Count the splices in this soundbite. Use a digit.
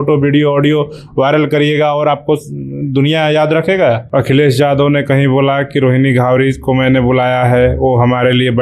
1